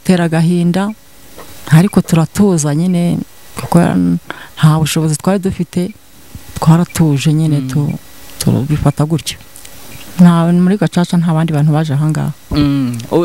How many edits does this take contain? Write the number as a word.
one